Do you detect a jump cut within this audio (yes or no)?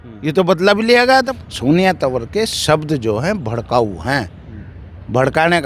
yes